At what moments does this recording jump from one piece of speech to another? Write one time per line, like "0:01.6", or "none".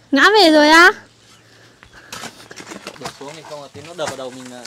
0:02.9